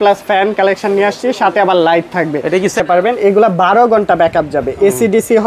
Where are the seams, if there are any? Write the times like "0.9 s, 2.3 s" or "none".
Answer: 2.8 s